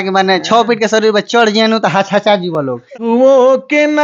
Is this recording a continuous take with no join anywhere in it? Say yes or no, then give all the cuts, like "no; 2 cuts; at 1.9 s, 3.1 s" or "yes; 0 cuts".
no; 1 cut; at 3.0 s